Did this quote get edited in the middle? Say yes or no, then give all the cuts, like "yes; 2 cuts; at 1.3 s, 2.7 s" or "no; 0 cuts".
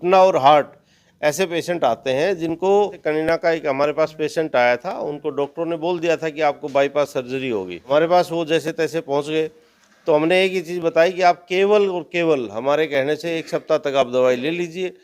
yes; 2 cuts; at 3.3 s, 7.8 s